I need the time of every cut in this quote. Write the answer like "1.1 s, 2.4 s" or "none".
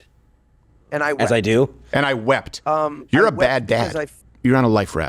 4.1 s